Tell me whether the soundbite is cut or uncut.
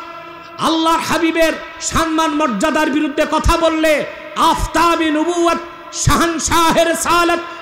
uncut